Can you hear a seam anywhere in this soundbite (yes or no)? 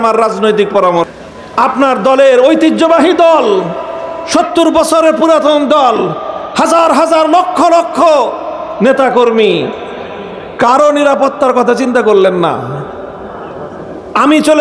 yes